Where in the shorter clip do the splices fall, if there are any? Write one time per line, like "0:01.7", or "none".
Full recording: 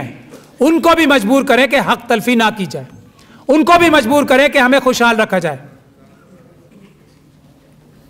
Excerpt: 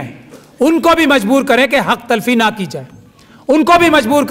none